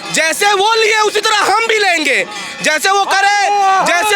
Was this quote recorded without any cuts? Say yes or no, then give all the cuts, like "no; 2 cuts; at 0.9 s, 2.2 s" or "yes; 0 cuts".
yes; 0 cuts